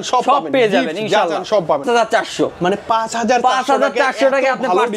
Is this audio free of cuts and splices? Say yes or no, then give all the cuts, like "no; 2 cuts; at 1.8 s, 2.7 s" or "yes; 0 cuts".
no; 1 cut; at 1.8 s